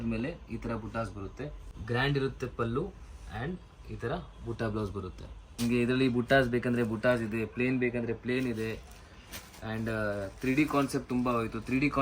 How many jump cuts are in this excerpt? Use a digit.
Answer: 2